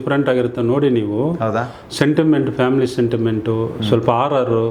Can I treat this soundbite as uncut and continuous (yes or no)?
yes